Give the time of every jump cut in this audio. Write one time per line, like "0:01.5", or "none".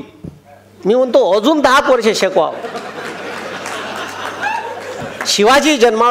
0:05.0